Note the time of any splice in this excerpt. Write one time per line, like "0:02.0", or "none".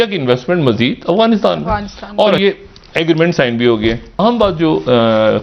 0:02.4
0:04.1

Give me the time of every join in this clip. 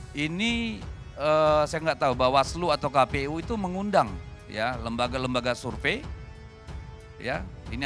none

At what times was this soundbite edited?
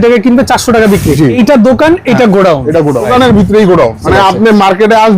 0:01.4
0:03.1
0:04.0

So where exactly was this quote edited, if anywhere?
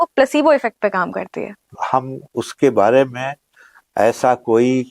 0:01.8

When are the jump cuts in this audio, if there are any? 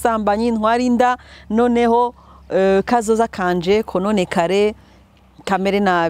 none

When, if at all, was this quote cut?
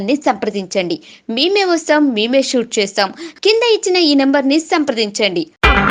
none

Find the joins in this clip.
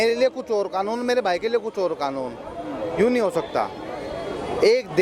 none

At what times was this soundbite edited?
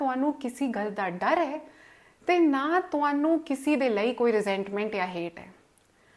none

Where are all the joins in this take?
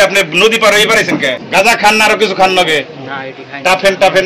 0:01.4

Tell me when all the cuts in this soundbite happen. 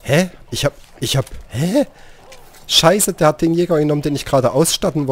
none

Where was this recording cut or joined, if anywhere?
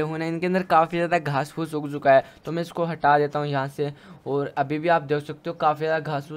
none

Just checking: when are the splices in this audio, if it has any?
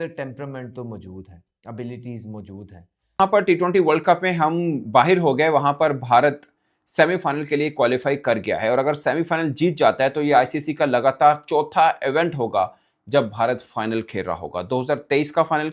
0:03.2

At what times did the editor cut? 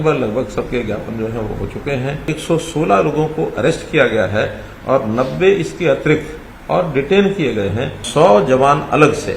0:02.3
0:08.0

